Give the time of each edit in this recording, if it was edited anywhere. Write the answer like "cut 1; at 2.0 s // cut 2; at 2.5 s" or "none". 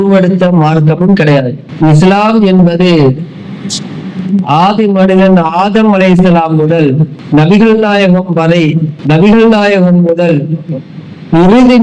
cut 1; at 1.6 s // cut 2; at 7.2 s // cut 3; at 8.9 s